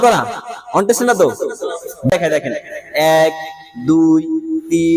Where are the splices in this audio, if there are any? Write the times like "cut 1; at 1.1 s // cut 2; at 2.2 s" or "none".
cut 1; at 2.1 s